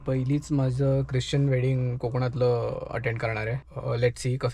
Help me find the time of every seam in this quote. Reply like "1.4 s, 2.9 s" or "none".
3.6 s